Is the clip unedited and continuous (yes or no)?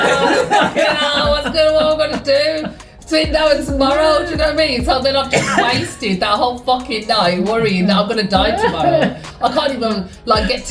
yes